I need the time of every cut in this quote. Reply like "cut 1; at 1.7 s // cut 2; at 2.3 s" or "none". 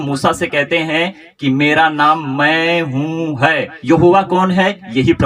cut 1; at 3.7 s

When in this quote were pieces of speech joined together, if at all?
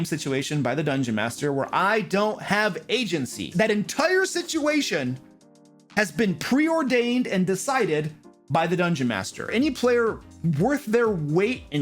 cut 1; at 3.5 s // cut 2; at 9.5 s

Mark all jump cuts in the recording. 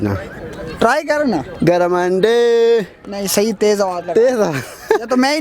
none

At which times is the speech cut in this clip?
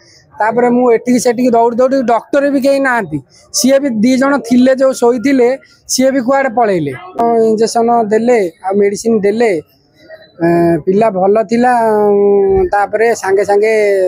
cut 1; at 7.2 s

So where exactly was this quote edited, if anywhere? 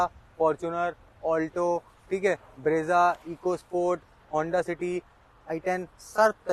none

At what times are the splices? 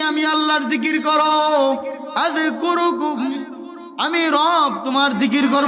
none

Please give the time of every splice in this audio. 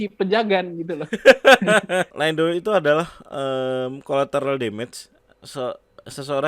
cut 1; at 2.1 s

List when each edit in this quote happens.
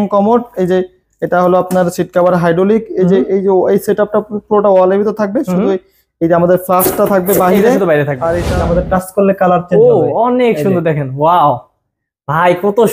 cut 1; at 8.5 s

